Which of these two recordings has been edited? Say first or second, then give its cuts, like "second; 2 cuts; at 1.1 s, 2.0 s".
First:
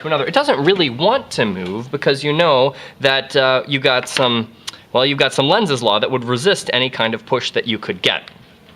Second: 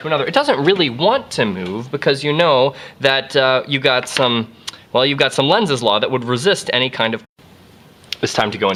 first; 1 cut; at 7.3 s